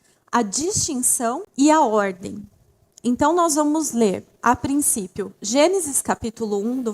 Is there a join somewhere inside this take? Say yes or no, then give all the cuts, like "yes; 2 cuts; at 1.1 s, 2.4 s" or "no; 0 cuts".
yes; 1 cut; at 1.5 s